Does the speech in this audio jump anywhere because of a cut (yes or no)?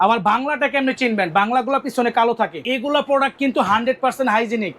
yes